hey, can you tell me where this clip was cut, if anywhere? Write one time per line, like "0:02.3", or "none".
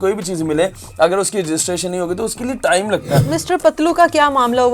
0:03.2